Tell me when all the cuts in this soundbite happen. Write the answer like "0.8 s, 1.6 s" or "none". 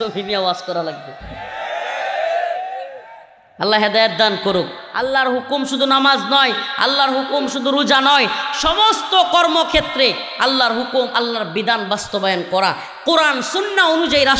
4.8 s